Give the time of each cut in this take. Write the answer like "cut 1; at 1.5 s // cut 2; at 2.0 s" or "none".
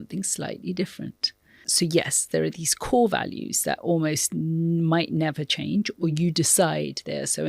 cut 1; at 1.7 s